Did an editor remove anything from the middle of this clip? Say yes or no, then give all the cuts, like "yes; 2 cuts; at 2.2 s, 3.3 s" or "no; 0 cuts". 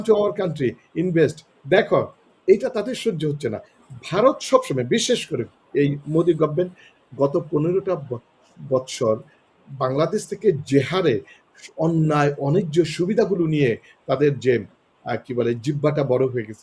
yes; 1 cut; at 3.7 s